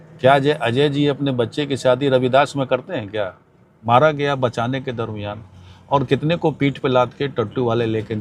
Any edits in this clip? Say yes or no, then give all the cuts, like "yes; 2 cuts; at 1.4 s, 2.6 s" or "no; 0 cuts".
yes; 1 cut; at 3.7 s